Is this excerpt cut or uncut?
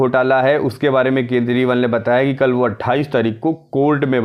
uncut